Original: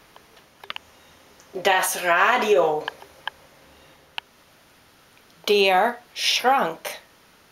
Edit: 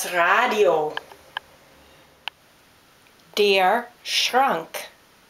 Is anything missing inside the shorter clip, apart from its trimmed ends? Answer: yes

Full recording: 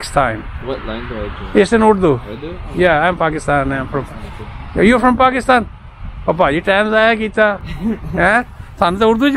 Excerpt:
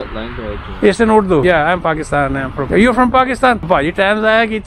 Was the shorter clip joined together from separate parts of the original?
yes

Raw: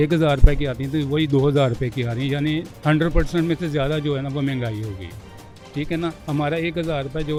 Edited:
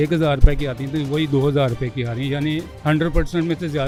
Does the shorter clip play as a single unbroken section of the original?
yes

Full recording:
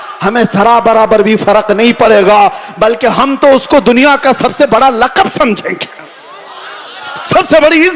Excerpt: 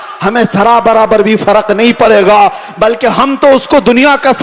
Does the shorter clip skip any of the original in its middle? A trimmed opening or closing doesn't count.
no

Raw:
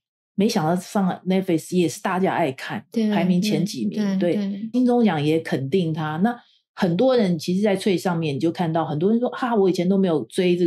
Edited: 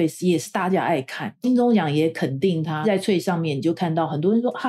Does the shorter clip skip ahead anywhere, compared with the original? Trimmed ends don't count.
yes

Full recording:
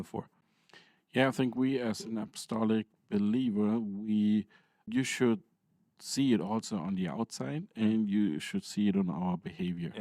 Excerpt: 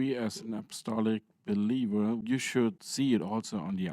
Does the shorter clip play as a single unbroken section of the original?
no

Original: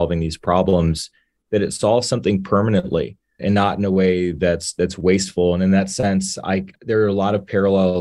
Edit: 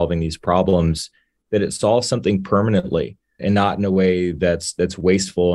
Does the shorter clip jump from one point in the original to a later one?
no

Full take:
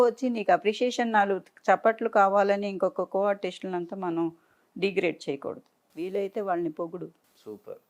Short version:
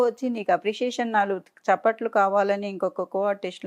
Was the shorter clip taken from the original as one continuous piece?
yes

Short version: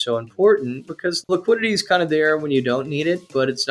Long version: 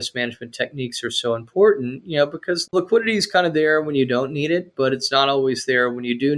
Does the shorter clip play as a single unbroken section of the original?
no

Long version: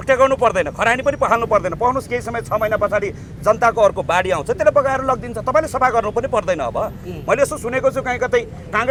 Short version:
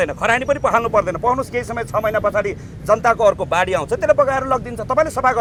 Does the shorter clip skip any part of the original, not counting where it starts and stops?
no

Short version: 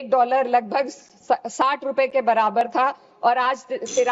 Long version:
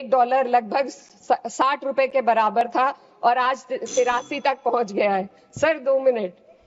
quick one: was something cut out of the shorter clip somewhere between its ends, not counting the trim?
no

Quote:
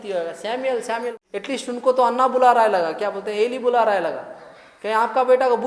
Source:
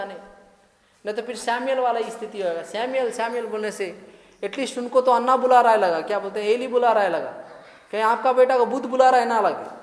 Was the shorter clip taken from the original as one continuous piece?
no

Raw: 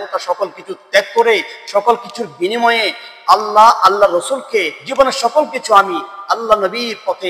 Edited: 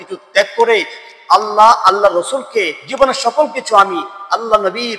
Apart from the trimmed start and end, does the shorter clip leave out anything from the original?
yes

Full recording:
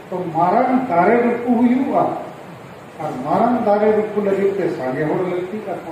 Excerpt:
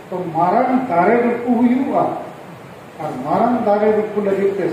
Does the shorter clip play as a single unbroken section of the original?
yes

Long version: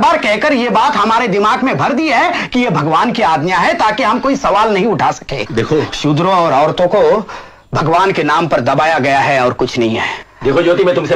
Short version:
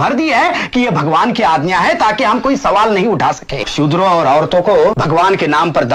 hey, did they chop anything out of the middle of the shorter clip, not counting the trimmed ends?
yes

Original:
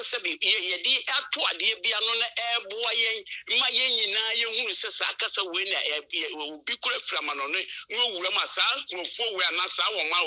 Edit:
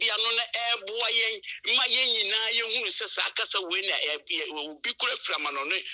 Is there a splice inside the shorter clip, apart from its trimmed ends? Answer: no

